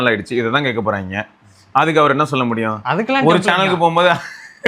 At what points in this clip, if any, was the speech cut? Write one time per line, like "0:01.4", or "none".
none